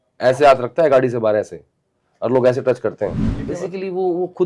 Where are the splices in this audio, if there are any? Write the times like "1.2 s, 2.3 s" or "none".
3.3 s

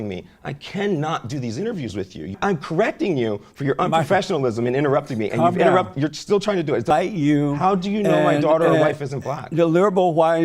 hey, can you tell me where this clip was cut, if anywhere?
2.4 s, 6.9 s

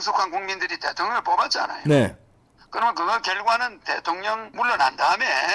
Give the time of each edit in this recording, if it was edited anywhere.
4.5 s

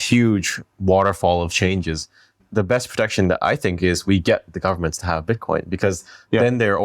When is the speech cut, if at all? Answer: 2.4 s

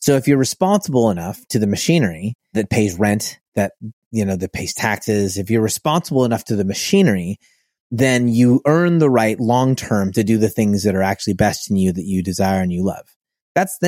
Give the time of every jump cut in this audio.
2.5 s

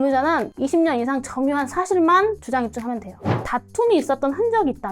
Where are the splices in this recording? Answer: 3.4 s

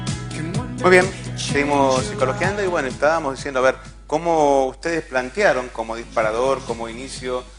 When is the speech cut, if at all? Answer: 4.2 s

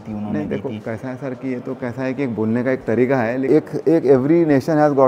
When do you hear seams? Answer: none

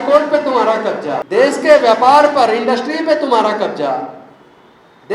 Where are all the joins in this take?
1.2 s

